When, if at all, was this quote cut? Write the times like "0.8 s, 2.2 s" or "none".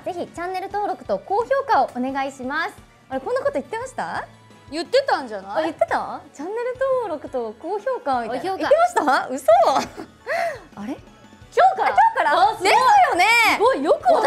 none